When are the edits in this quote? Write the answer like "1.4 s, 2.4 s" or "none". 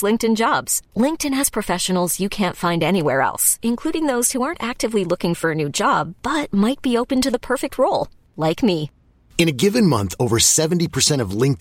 none